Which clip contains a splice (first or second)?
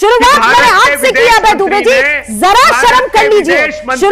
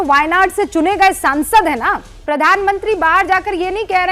second